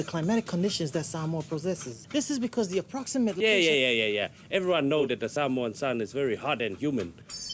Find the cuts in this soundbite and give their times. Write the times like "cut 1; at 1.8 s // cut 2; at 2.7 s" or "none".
none